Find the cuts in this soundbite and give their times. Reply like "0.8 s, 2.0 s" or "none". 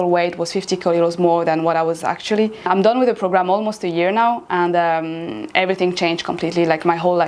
none